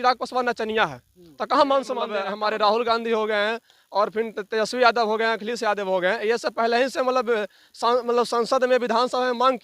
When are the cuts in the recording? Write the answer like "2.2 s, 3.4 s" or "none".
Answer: 2.2 s